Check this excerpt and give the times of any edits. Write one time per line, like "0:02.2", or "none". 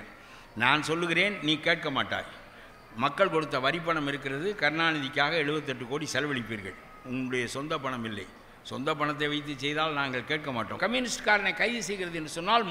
0:10.8